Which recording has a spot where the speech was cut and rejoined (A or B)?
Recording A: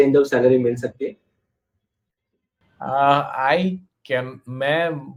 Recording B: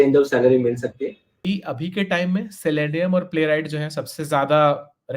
B